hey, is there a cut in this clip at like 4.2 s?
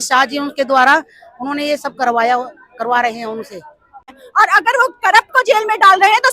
yes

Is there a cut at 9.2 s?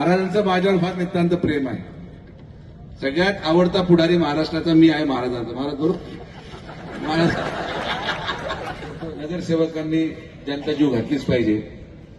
yes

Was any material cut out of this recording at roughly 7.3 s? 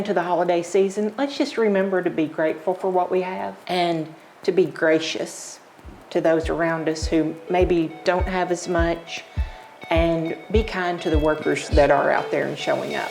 no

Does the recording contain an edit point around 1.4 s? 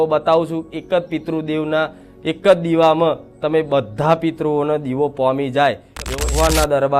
no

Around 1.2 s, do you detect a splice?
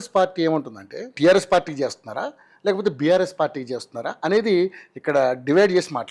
yes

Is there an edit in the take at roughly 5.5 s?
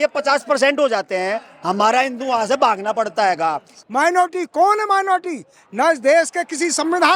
no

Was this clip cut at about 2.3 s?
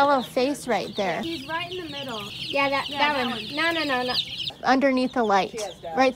yes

